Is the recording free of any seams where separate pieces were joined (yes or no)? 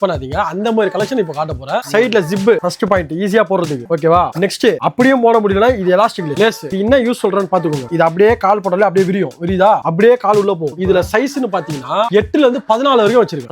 no